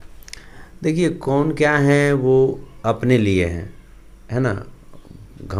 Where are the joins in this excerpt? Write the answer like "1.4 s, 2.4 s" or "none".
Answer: none